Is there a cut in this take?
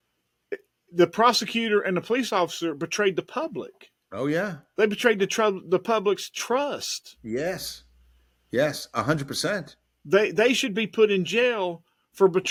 no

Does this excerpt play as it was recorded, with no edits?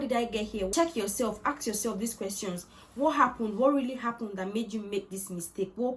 yes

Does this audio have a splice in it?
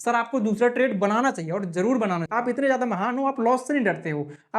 yes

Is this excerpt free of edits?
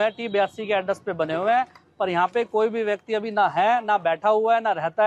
yes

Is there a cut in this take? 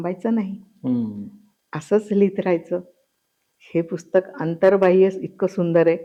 no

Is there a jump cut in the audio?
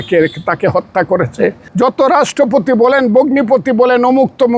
yes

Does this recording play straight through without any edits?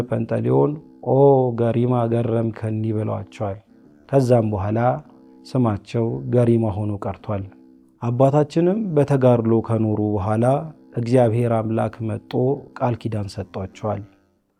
yes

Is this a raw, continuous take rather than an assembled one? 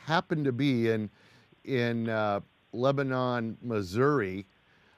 no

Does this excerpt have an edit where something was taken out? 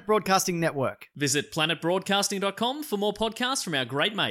no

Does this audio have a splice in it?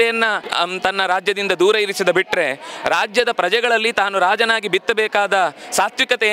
no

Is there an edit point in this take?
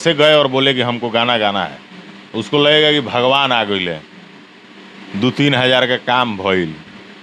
no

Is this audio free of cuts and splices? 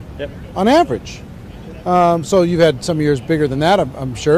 yes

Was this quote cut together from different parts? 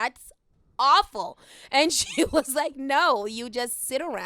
no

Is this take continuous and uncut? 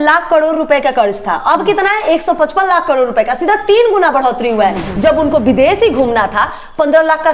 no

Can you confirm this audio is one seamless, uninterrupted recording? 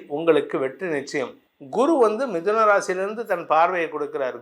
no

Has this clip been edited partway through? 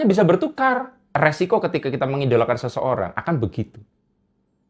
yes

